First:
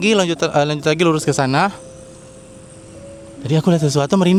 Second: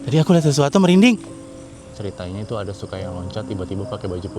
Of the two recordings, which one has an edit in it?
second; 1 cut; at 1.9 s

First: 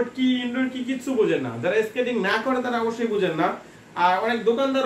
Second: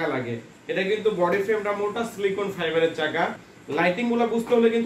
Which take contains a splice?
second; 1 cut; at 3.5 s

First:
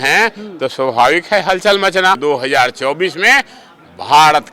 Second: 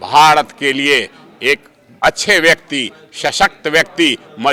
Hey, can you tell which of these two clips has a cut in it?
first; 1 cut; at 2.2 s

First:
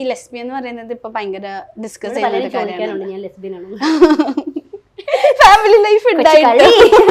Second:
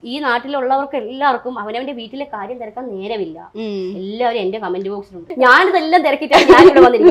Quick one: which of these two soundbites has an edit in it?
second; 1 cut; at 5.2 s

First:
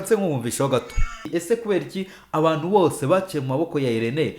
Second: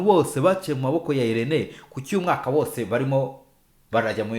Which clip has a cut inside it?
first; 1 cut; at 1.3 s

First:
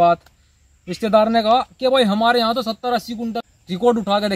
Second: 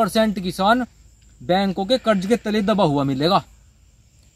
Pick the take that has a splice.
first; 1 cut; at 3.4 s

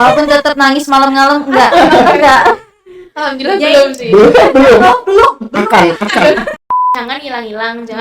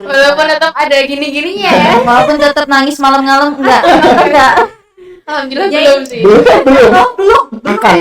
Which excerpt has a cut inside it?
first; 1 cut; at 6.8 s

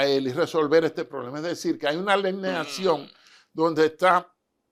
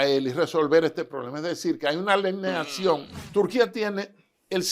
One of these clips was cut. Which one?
second; 1 cut; at 3.2 s

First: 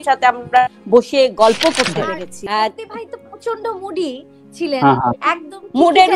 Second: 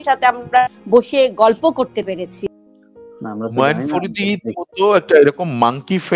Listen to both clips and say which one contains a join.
first; 1 cut; at 2.3 s

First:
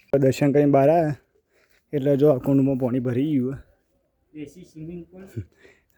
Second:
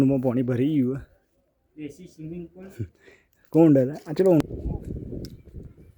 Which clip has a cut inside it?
second; 1 cut; at 4.4 s

